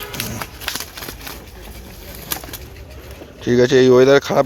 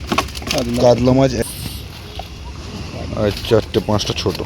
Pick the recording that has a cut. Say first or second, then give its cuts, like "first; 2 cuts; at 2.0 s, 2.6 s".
second; 1 cut; at 1.4 s